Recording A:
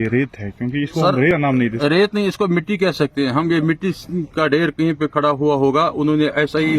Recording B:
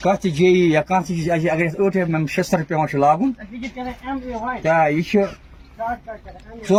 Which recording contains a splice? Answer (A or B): A